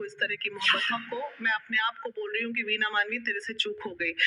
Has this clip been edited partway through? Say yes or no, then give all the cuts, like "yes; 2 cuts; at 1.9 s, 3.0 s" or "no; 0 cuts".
yes; 1 cut; at 0.9 s